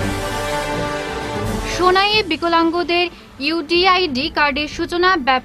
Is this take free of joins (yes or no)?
no